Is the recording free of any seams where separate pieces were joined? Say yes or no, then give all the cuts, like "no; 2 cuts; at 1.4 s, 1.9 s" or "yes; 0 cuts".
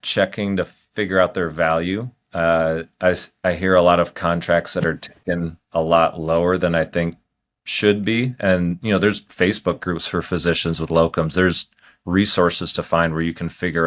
yes; 0 cuts